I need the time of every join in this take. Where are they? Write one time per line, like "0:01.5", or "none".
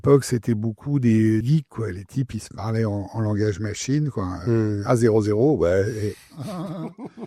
0:01.4